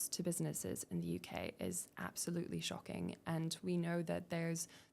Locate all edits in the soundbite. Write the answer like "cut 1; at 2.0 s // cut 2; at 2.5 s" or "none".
none